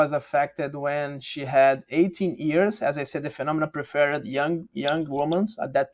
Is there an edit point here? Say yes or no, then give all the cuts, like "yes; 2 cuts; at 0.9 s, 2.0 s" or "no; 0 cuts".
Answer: no; 0 cuts